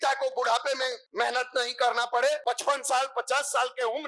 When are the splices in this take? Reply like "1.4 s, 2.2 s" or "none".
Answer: 1.0 s, 2.4 s